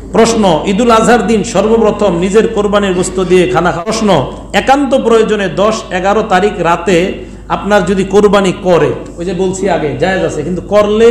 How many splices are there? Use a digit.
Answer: 1